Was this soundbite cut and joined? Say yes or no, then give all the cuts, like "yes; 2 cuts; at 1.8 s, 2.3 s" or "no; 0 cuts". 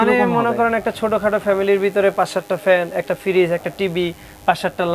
no; 0 cuts